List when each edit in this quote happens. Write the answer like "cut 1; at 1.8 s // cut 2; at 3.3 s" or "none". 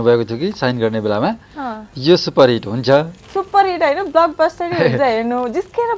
none